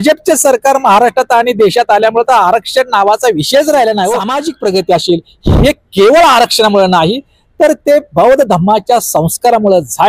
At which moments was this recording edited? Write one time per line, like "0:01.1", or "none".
0:04.4